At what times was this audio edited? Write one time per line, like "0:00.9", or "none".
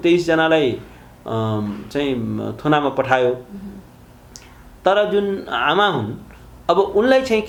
none